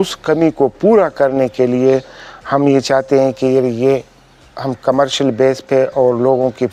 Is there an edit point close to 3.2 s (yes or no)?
no